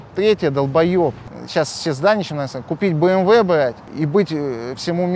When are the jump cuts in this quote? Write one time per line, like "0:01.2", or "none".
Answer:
0:01.3
0:03.8